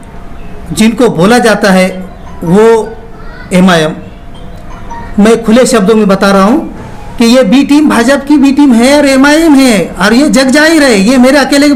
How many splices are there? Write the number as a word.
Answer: zero